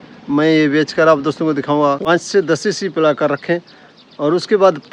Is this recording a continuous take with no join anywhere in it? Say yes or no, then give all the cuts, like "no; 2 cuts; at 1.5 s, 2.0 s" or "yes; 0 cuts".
no; 1 cut; at 2.0 s